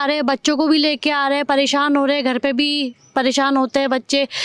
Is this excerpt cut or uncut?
uncut